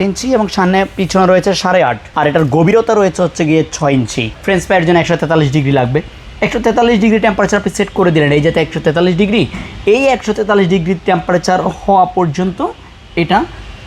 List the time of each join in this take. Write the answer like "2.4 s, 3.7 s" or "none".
2.0 s, 4.3 s